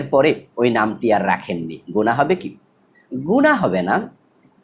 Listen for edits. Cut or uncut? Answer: uncut